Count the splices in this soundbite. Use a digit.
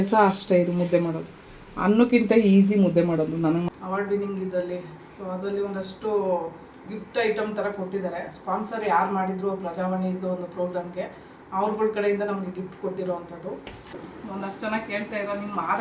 2